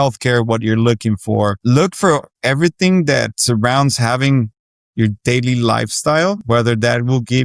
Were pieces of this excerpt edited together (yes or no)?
yes